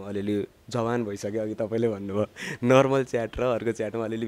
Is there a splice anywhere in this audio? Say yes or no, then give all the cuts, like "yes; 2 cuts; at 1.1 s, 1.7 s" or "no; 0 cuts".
no; 0 cuts